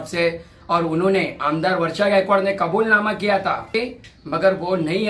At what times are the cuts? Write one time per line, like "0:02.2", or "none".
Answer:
0:03.7